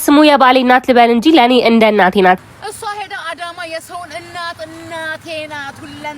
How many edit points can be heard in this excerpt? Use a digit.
1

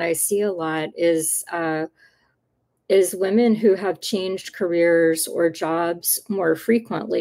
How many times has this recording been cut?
0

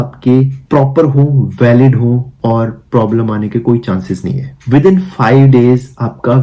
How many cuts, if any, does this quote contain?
1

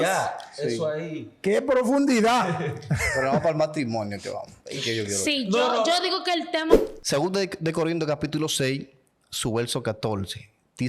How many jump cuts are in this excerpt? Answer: 1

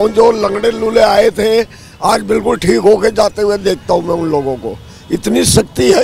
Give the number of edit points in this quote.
0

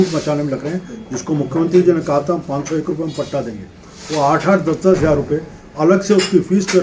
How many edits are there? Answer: 0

